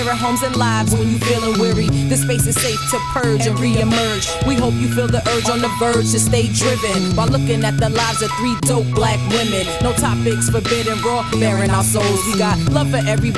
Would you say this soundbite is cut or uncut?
uncut